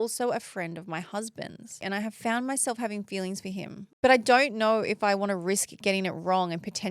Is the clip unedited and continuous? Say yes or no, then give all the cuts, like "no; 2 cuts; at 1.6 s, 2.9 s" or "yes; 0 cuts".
no; 2 cuts; at 1.8 s, 3.8 s